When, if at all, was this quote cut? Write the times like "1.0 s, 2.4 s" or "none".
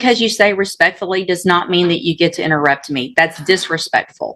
none